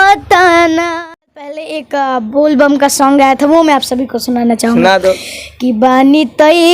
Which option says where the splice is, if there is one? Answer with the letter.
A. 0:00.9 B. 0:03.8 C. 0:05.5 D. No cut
A